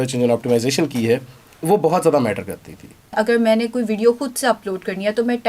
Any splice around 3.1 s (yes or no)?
yes